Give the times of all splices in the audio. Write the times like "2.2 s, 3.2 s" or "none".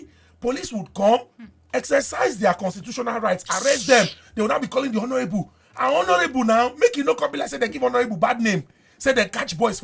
none